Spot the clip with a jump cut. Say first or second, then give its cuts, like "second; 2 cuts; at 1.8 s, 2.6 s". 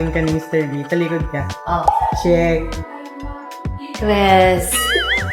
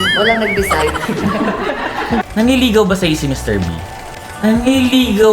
second; 1 cut; at 2.3 s